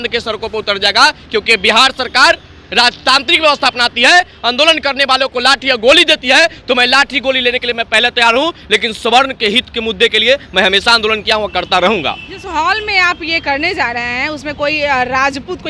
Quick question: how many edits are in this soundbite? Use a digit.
0